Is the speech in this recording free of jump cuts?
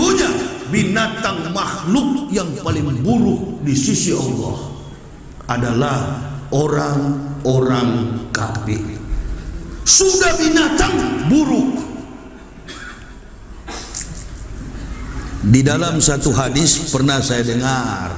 yes; 0 cuts

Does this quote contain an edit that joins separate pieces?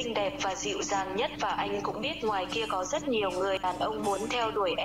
yes; 1 cut; at 3.6 s

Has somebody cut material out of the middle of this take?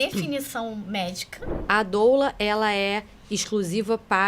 yes; 1 cut; at 1.6 s

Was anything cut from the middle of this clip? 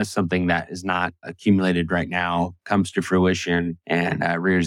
yes; 2 cuts; at 1.3 s, 3.8 s

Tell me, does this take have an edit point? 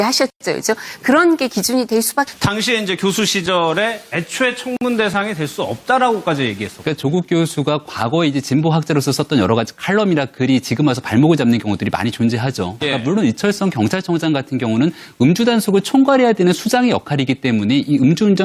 no; 0 cuts

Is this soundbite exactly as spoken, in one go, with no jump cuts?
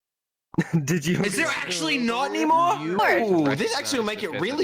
no; 1 cut; at 3.0 s

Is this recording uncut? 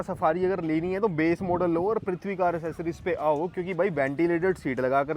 yes; 0 cuts

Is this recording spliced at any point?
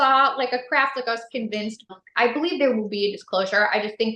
yes; 1 cut; at 2.0 s

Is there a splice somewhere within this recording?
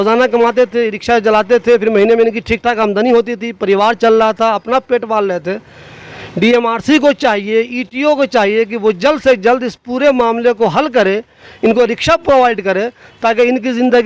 no; 0 cuts

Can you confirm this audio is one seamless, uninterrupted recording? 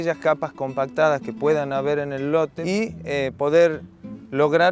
no; 1 cut; at 2.6 s

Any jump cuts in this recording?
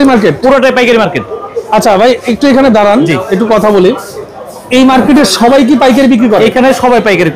no; 0 cuts

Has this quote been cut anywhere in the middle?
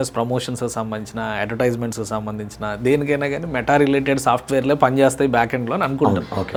no; 0 cuts

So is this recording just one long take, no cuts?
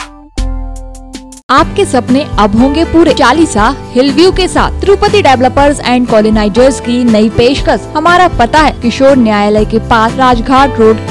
no; 5 cuts; at 1.4 s, 3.2 s, 7.9 s, 8.8 s, 10.1 s

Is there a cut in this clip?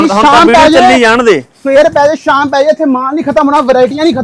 no; 0 cuts

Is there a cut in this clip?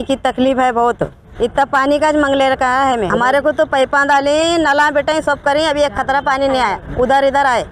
yes; 2 cuts; at 1.2 s, 3.1 s

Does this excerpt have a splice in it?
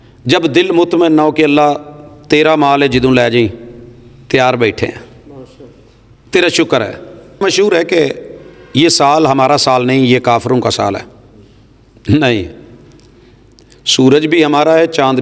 yes; 1 cut; at 7.4 s

